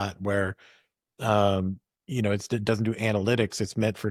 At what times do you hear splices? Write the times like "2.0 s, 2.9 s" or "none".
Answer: none